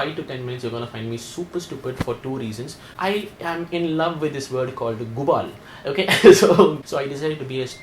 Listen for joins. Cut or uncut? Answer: cut